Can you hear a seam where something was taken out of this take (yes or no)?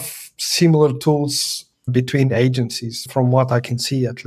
yes